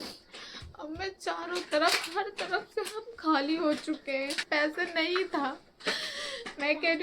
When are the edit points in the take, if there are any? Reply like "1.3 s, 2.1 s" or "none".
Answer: 4.4 s